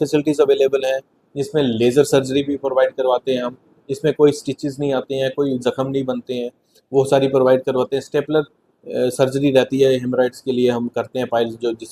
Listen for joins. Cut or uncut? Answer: uncut